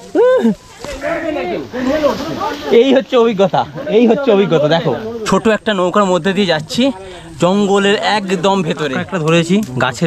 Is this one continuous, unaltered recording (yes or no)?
no